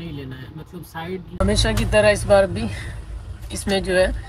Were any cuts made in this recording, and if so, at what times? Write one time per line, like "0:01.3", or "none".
0:01.4